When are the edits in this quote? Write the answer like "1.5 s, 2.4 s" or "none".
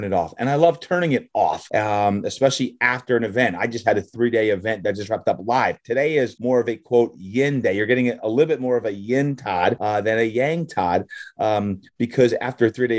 1.6 s, 6.4 s, 9.8 s